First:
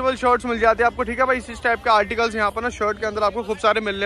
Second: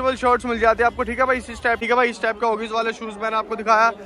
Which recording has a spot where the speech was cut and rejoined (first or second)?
second